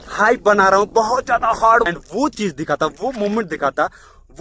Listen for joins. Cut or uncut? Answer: cut